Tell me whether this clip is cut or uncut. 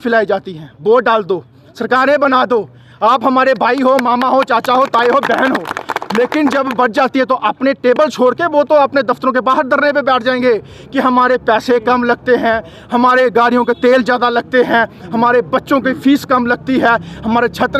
uncut